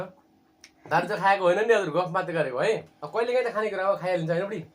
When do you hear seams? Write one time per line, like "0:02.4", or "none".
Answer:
0:02.9